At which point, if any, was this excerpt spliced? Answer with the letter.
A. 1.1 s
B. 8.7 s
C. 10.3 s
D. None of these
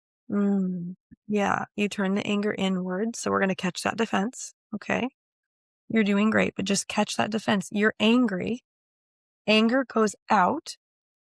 A